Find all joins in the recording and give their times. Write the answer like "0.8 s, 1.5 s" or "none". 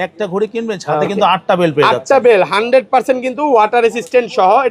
none